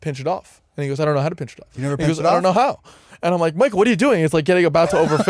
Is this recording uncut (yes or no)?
no